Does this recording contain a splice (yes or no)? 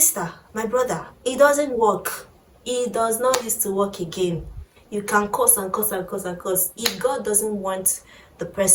no